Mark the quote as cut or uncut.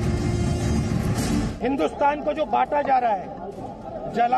cut